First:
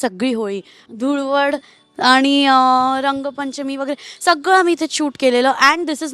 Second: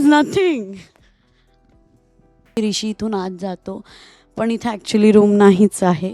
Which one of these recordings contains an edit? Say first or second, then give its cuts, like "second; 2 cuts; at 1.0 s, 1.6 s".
second; 1 cut; at 2.6 s